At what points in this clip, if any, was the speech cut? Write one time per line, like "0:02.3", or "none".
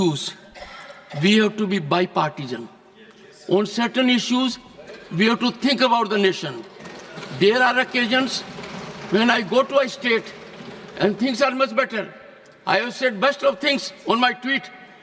none